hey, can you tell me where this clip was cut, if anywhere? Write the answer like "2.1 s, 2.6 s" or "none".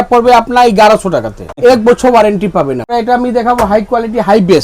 1.5 s, 2.9 s

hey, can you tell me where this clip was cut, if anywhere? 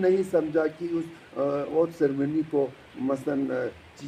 none

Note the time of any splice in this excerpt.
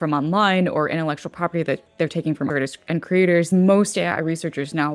2.5 s, 3.5 s

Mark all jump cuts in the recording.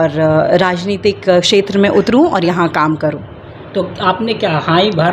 none

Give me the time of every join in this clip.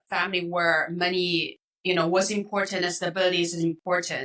none

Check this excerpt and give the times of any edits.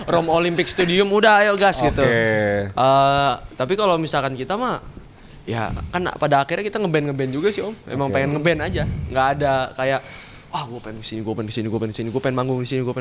none

